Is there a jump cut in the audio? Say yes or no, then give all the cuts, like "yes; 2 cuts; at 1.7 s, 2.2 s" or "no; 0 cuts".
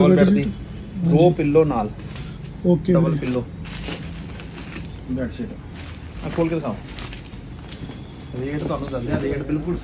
no; 0 cuts